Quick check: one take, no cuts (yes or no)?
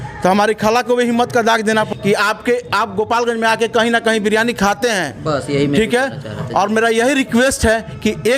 no